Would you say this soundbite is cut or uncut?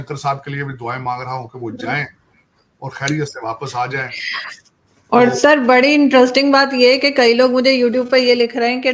uncut